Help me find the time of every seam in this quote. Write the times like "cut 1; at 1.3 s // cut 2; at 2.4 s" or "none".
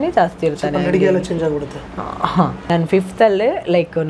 cut 1; at 2.6 s